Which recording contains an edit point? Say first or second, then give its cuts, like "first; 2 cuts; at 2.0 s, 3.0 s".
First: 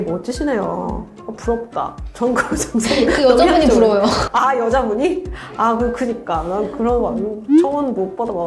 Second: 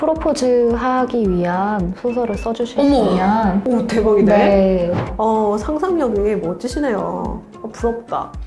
second; 1 cut; at 5.1 s